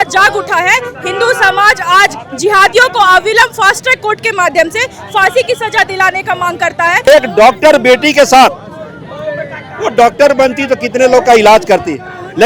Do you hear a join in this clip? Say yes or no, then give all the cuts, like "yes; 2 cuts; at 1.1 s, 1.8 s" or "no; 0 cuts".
yes; 1 cut; at 7.1 s